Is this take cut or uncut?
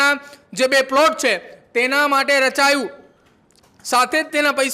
uncut